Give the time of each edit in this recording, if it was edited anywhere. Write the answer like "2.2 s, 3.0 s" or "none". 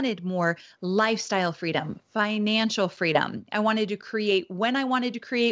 none